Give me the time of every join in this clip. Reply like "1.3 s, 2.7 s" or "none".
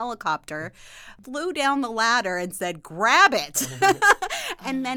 1.1 s